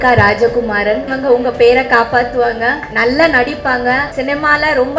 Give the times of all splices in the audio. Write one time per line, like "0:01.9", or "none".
0:01.1
0:02.9
0:04.1